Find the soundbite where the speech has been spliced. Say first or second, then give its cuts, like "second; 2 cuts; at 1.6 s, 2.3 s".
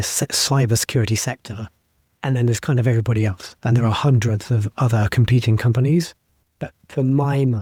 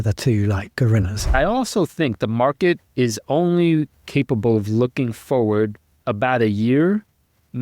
second; 1 cut; at 1.3 s